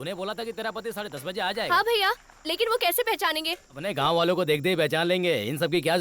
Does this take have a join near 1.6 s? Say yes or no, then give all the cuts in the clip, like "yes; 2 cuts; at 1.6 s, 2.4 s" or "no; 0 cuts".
no; 1 cut; at 3.8 s